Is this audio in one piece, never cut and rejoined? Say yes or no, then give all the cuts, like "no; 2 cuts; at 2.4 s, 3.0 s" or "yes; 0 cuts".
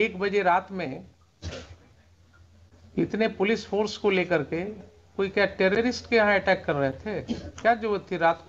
yes; 0 cuts